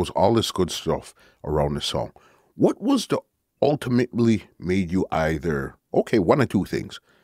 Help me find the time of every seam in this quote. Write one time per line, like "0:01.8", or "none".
none